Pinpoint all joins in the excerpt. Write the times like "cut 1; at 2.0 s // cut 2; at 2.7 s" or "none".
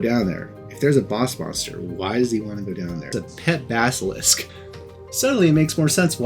cut 1; at 3.1 s // cut 2; at 4.5 s